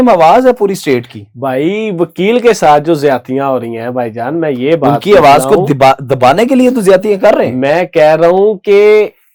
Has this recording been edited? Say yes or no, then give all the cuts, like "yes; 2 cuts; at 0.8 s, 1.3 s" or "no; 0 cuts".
no; 0 cuts